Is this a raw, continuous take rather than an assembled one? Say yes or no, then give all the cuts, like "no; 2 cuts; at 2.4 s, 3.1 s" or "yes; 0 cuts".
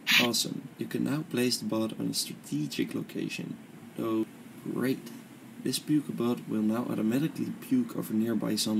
no; 1 cut; at 4.2 s